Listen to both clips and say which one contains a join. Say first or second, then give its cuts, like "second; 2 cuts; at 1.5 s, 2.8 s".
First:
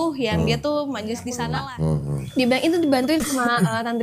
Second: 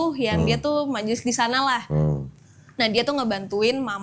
first; 1 cut; at 1.6 s